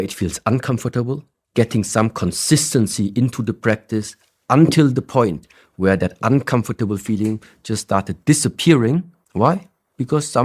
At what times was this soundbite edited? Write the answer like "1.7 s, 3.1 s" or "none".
1.3 s, 9.2 s